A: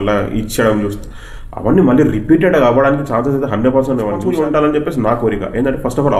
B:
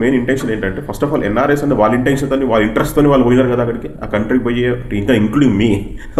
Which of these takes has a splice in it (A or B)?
A